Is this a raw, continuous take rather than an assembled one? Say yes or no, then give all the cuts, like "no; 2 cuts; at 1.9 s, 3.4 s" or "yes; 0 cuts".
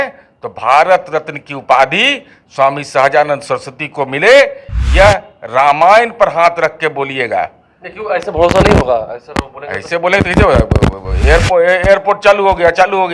yes; 0 cuts